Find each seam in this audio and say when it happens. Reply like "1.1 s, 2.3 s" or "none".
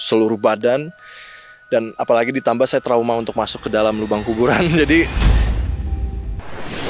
5.2 s